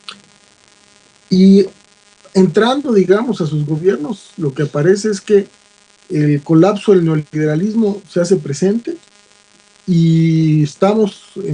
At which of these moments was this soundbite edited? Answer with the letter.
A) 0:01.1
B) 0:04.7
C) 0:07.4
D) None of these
C